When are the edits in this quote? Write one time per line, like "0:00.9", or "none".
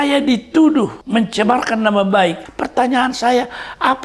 0:01.0
0:02.4